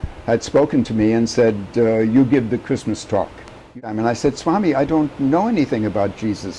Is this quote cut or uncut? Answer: cut